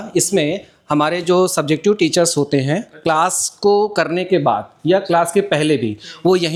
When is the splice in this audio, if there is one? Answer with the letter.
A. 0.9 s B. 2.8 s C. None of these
C